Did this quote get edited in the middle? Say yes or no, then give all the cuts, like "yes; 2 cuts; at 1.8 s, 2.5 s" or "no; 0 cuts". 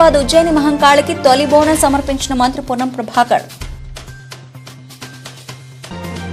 no; 0 cuts